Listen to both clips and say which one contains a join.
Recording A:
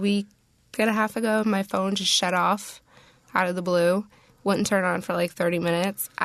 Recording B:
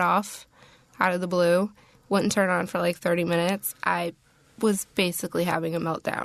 A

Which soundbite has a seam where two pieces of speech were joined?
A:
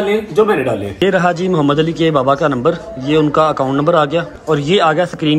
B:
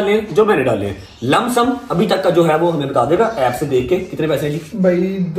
A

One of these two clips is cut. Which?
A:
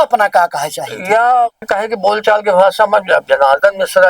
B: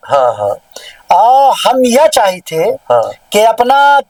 A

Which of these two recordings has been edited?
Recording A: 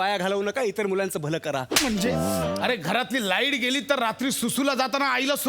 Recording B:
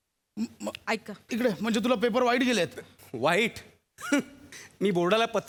A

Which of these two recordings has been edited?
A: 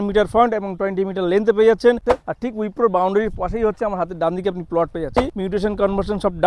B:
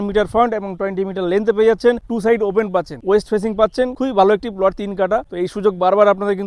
A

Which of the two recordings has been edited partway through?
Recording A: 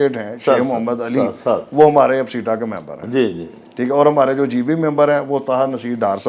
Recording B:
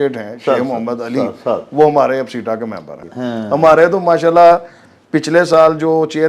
B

